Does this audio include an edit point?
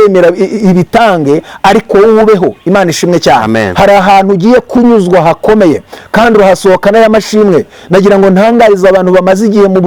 no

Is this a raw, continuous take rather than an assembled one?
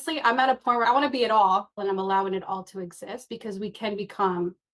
yes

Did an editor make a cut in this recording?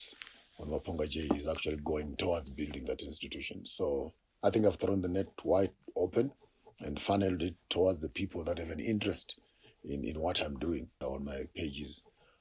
yes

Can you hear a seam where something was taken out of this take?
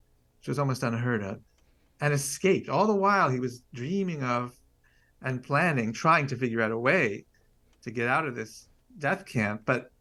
no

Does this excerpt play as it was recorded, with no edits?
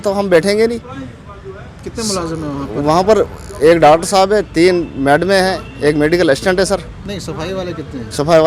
yes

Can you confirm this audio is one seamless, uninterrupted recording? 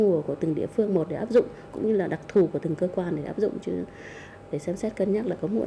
yes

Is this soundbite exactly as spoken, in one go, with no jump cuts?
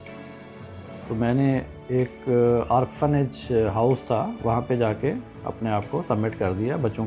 no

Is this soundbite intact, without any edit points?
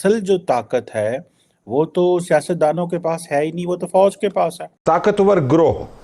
no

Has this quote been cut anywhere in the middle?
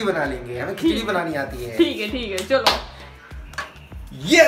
yes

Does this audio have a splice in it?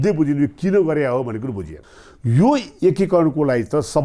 yes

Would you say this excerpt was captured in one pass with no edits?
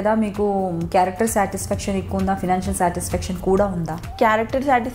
no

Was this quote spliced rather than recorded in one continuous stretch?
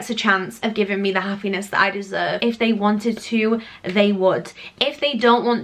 yes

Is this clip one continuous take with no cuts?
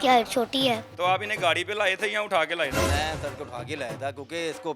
no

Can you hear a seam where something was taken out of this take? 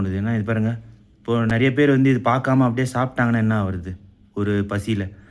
no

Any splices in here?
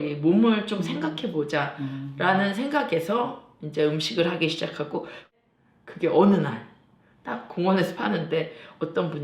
yes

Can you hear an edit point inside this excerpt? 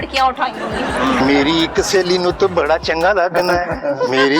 yes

